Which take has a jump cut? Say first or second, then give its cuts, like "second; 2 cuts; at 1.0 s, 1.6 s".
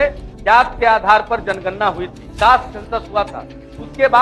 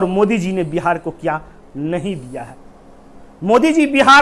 second; 1 cut; at 2.6 s